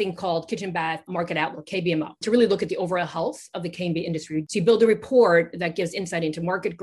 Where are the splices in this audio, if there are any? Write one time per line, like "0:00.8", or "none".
0:01.1
0:02.2
0:04.5